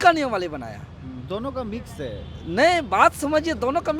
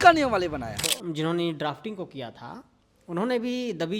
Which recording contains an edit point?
second; 1 cut; at 0.9 s

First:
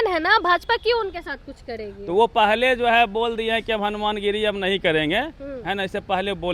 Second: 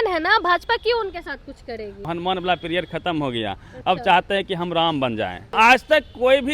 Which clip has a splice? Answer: second; 2 cuts; at 2.0 s, 5.5 s

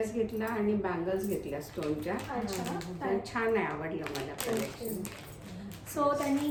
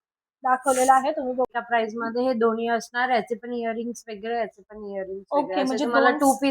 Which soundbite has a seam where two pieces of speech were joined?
second; 1 cut; at 1.5 s

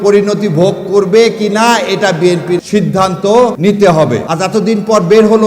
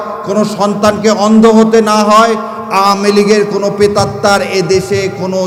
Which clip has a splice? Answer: first; 3 cuts; at 2.6 s, 3.6 s, 4.2 s

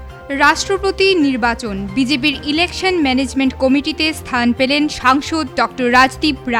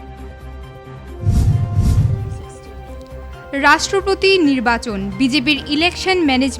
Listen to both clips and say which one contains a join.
second; 1 cut; at 2.2 s

